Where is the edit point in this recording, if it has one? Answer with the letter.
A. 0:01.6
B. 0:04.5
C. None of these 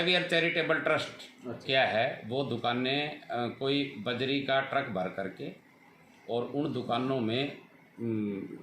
A